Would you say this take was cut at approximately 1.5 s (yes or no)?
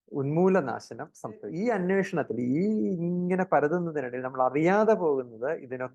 yes